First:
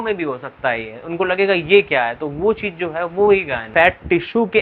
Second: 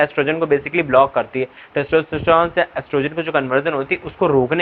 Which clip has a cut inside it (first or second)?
first